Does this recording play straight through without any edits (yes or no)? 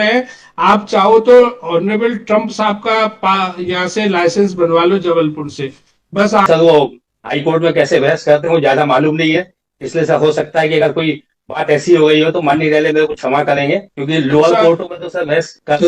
no